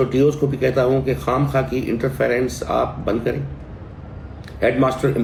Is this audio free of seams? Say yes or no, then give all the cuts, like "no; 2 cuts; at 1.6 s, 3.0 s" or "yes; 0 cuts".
yes; 0 cuts